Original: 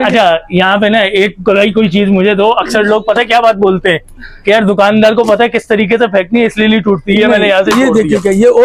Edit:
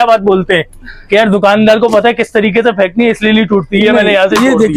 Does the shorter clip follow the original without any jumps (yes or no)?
yes